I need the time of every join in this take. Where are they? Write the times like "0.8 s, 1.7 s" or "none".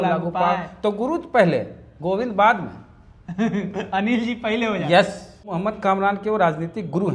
5.5 s

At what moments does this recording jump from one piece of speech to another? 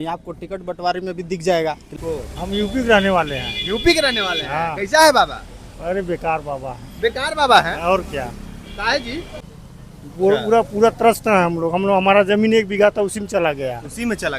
2.0 s, 9.4 s

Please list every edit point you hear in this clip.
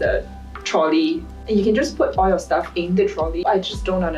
1.3 s, 3.4 s

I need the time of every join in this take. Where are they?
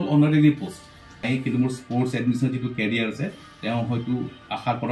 1.3 s

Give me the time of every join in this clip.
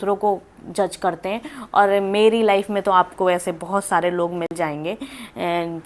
none

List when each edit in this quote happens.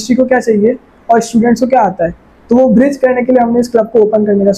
none

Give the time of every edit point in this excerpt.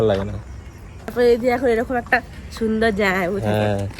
1.1 s

